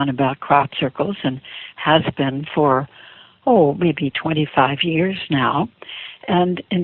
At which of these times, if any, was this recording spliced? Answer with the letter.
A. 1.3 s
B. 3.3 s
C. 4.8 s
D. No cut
A